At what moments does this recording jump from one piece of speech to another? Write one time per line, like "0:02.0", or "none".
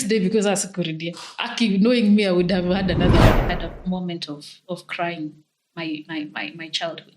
0:03.5